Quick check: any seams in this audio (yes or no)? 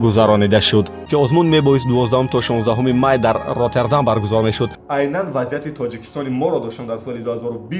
yes